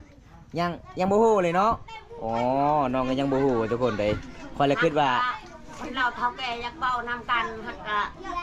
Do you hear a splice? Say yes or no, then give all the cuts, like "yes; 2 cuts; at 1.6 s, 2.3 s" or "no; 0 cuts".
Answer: no; 0 cuts